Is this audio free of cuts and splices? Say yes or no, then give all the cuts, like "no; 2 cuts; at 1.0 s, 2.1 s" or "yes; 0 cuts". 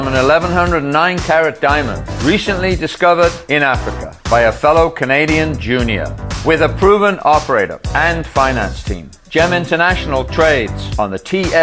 yes; 0 cuts